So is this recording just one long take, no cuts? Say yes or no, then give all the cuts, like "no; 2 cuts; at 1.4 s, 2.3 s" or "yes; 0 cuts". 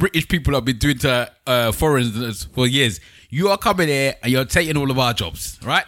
yes; 0 cuts